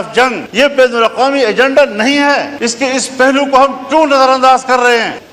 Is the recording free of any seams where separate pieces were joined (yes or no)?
no